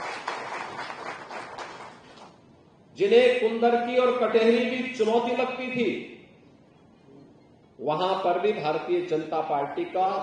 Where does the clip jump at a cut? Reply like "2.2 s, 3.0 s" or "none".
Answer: none